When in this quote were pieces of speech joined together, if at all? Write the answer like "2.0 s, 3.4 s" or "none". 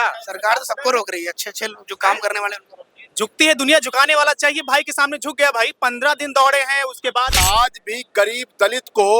7.4 s

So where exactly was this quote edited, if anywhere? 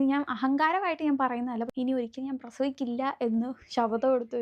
1.7 s

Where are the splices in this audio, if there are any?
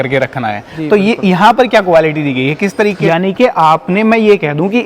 3.0 s

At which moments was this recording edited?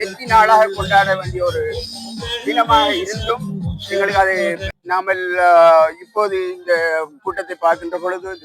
4.7 s

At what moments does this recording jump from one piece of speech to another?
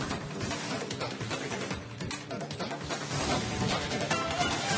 2.5 s

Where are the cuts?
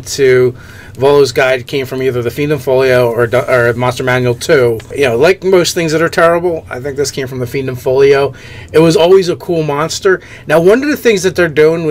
6.3 s

